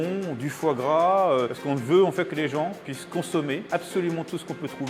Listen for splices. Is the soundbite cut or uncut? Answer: cut